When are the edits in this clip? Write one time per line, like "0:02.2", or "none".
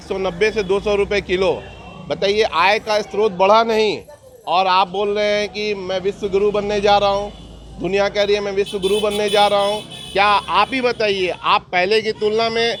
none